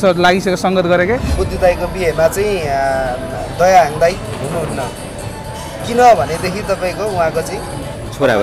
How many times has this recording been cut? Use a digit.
1